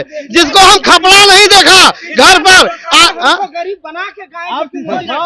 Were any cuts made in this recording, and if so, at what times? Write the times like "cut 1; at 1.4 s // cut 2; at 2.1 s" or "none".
none